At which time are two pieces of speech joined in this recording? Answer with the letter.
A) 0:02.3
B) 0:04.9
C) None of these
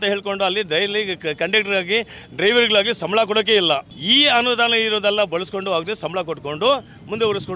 C